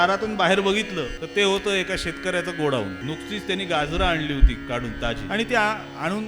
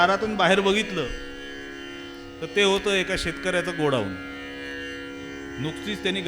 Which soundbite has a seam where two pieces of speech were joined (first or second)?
first